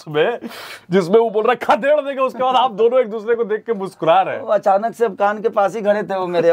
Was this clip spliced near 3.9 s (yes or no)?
no